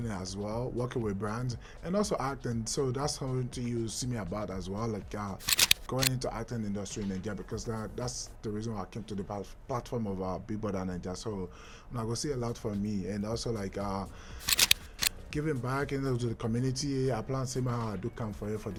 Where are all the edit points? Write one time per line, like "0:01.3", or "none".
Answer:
none

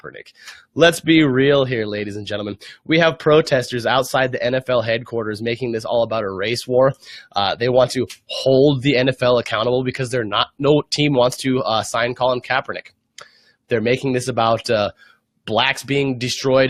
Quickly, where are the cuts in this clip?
none

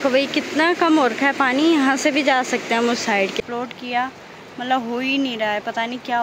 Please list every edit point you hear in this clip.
0:03.4

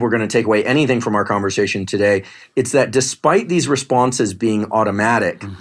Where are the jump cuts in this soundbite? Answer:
none

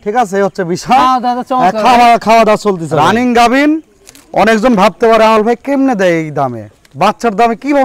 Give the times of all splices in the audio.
0:02.9

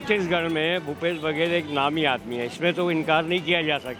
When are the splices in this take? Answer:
none

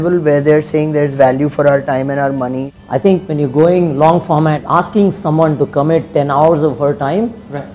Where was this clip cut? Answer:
0:02.7
0:04.6

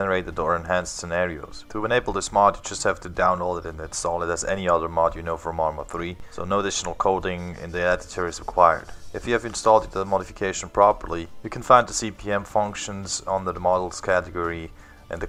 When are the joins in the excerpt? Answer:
none

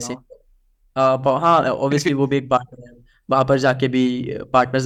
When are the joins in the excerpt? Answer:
none

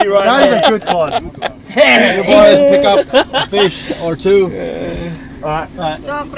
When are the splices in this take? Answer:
none

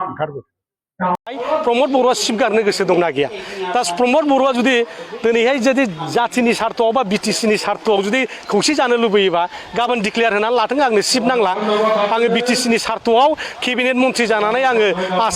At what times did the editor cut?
0:01.2

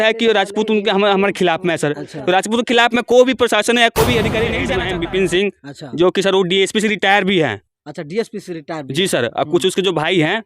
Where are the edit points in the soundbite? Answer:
0:04.6

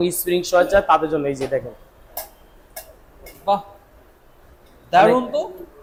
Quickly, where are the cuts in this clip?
none

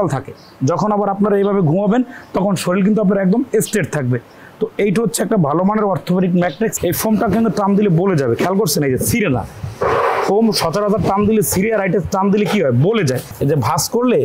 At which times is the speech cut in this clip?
0:06.7
0:13.3

